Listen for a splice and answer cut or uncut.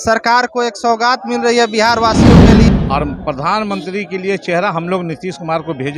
cut